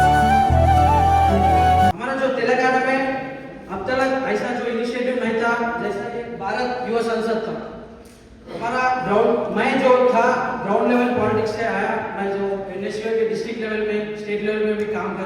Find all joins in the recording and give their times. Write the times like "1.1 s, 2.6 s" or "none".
1.9 s